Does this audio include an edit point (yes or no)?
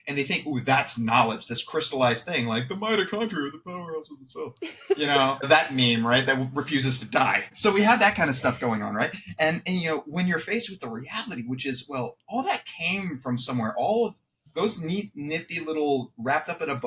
yes